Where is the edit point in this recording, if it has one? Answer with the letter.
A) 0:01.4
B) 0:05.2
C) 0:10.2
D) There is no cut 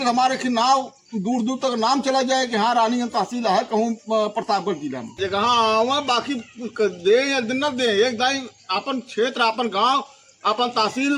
B